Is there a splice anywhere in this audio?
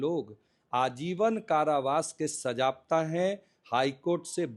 no; 0 cuts

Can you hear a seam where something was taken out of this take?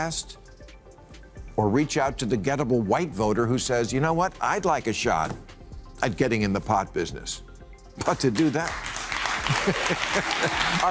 no; 0 cuts

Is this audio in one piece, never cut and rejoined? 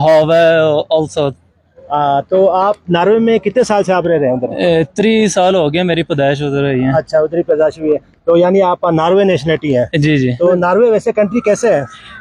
yes; 0 cuts

